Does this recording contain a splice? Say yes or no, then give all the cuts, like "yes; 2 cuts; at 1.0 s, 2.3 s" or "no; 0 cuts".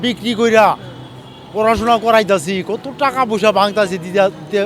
no; 0 cuts